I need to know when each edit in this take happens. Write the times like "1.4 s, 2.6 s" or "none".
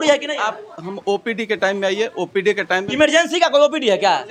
none